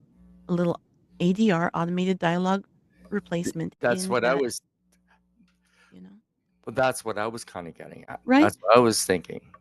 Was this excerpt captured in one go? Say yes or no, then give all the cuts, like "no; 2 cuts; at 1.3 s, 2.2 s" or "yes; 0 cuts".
yes; 0 cuts